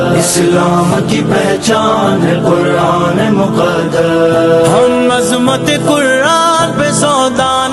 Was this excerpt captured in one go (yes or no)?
yes